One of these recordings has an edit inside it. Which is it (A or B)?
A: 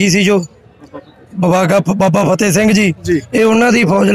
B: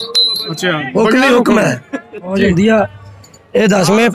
B